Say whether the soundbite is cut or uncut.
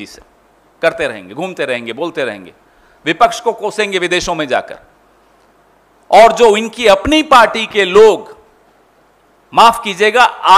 uncut